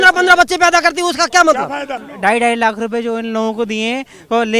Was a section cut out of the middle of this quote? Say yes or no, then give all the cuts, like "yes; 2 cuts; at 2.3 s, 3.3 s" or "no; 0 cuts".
yes; 1 cut; at 2.0 s